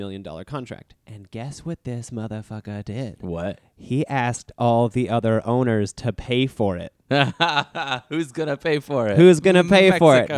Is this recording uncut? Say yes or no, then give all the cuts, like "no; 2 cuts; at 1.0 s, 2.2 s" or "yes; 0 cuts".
yes; 0 cuts